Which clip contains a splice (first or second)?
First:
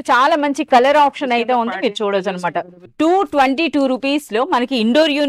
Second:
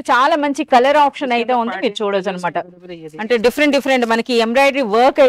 first